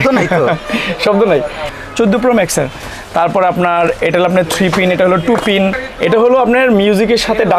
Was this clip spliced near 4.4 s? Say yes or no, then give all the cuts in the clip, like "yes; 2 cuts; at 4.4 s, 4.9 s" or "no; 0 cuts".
no; 2 cuts; at 1.7 s, 5.9 s